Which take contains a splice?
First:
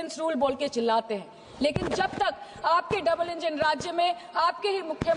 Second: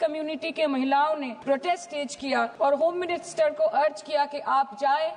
second; 2 cuts; at 1.3 s, 2.5 s

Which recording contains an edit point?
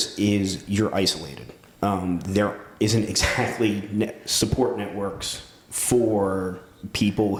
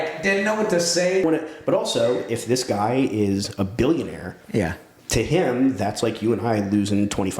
second; 1 cut; at 1.2 s

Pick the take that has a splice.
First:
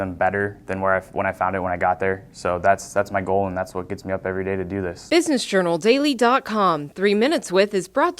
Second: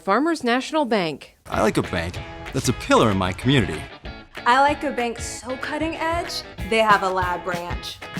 first; 1 cut; at 5.0 s

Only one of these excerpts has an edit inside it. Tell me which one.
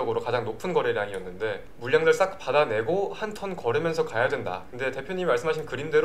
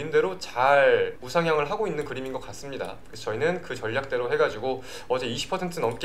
second; 2 cuts; at 1.2 s, 3.1 s

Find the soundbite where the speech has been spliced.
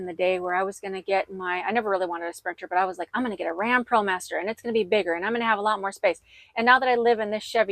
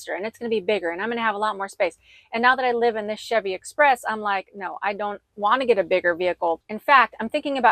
second; 1 cut; at 6.6 s

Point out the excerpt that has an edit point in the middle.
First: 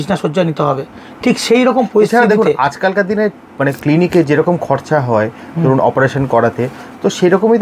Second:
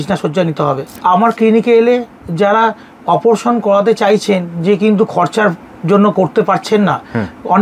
second; 1 cut; at 0.9 s

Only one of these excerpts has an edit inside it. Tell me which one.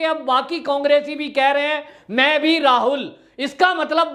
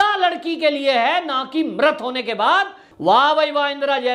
second; 1 cut; at 2.8 s

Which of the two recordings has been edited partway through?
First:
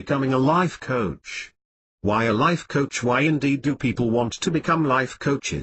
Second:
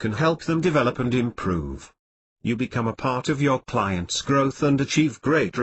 second; 1 cut; at 1.0 s

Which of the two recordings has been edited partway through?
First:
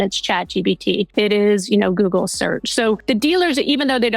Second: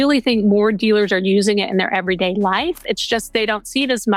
first; 2 cuts; at 1.1 s, 3.0 s

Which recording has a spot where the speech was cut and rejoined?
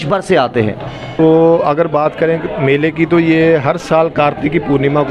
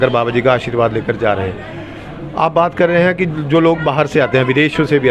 first; 1 cut; at 1.1 s

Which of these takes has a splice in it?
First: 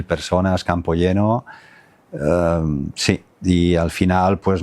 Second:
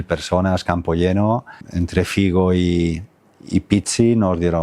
second; 1 cut; at 1.6 s

